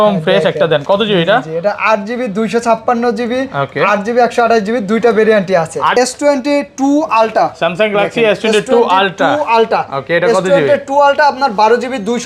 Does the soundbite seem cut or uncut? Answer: cut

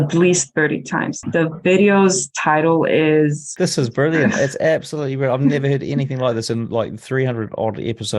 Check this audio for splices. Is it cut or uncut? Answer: cut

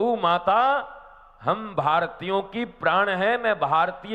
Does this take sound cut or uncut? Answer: uncut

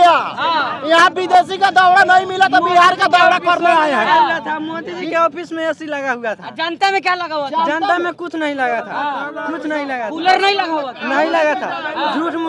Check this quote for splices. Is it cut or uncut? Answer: uncut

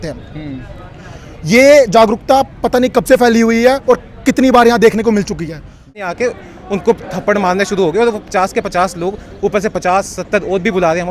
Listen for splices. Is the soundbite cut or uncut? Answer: cut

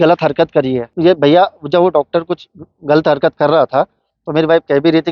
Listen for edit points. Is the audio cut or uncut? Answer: cut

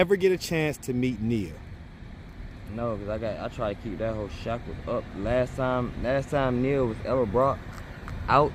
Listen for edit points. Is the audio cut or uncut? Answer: uncut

